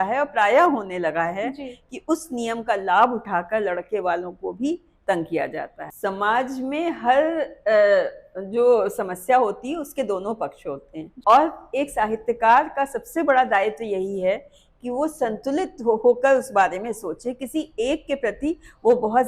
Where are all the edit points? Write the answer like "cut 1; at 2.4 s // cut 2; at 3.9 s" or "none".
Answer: cut 1; at 5.8 s // cut 2; at 11.1 s